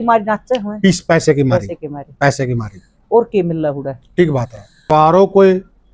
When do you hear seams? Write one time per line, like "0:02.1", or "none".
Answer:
0:04.9